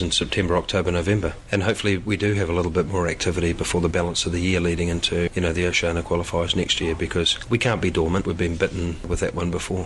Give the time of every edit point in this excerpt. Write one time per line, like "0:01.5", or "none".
0:01.3
0:05.3
0:07.4
0:08.2
0:09.1